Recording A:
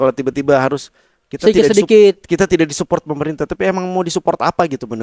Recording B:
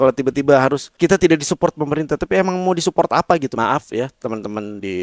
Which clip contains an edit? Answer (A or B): B